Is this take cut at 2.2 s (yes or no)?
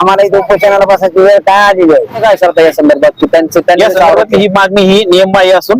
yes